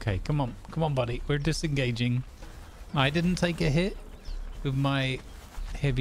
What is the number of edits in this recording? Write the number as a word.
one